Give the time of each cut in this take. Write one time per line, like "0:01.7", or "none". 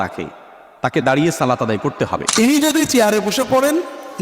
0:02.3